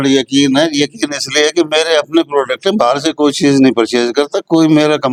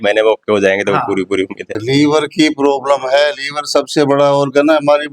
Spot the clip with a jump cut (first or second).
second